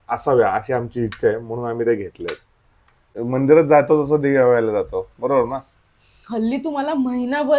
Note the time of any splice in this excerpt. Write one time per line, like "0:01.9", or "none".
0:03.1

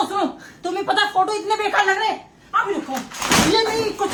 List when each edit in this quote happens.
none

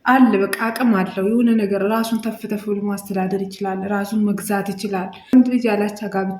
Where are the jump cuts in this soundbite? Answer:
0:05.3

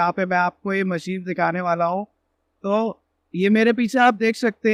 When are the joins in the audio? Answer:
none

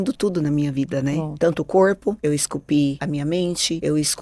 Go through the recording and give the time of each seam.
0:01.3
0:02.2
0:03.3

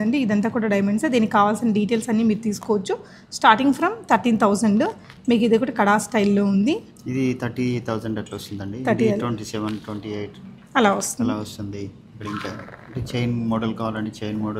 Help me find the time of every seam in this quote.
none

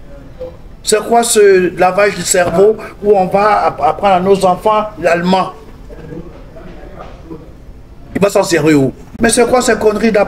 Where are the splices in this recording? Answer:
0:09.0

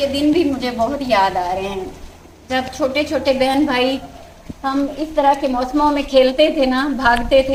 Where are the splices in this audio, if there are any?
none

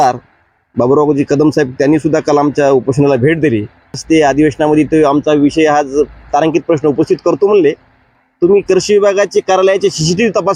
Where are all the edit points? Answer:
0:04.0
0:08.1

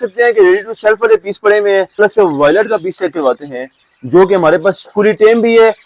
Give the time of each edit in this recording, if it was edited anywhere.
0:02.0

